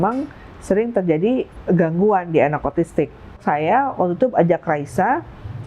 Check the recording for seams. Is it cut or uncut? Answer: cut